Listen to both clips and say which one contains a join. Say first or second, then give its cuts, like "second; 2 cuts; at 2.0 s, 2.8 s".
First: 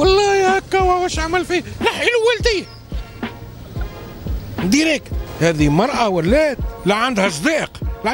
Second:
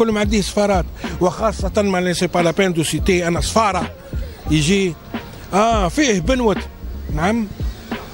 first; 2 cuts; at 5.2 s, 6.7 s